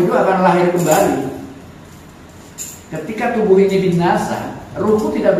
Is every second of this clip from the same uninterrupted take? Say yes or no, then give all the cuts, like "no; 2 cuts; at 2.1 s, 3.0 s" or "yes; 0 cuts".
yes; 0 cuts